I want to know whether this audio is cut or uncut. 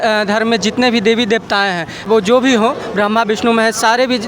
cut